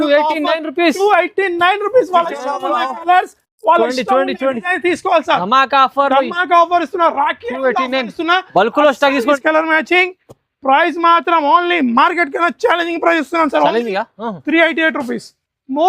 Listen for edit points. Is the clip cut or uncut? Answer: cut